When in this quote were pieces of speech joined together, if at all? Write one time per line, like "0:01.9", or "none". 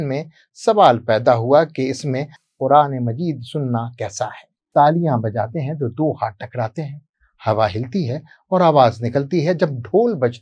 0:04.5